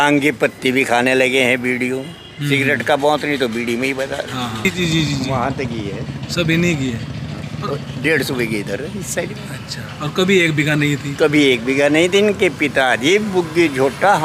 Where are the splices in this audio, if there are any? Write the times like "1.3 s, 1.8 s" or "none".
4.6 s